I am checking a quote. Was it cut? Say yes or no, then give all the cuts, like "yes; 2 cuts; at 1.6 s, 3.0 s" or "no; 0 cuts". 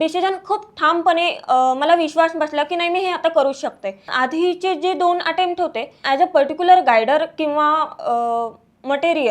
yes; 2 cuts; at 4.1 s, 6.0 s